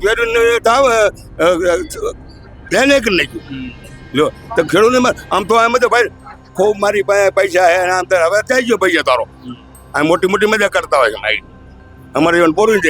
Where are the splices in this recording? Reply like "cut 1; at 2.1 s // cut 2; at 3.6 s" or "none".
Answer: none